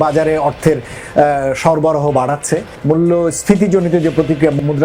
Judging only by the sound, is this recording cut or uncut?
uncut